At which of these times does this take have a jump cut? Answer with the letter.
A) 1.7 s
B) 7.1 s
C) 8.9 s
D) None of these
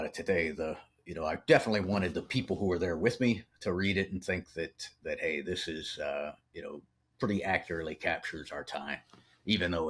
D